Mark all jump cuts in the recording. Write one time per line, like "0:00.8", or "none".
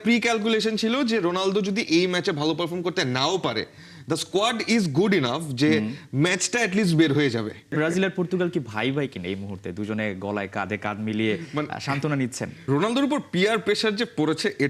0:07.7
0:12.5